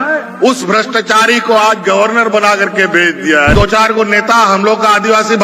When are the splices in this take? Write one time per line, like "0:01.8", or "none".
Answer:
0:03.5